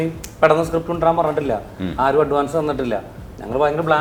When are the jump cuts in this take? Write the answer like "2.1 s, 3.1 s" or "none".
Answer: none